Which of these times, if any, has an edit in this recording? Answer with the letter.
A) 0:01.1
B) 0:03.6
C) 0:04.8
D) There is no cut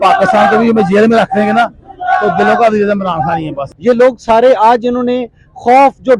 B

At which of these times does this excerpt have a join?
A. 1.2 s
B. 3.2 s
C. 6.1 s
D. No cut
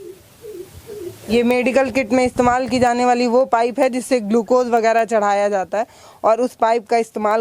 A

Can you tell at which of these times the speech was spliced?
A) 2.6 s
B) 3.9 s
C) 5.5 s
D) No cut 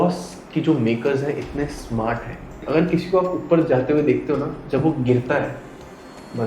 A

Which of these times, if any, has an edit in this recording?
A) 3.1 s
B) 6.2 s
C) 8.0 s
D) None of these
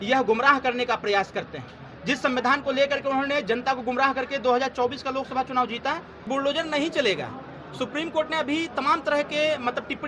B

